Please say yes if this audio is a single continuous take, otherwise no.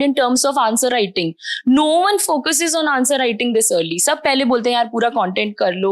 yes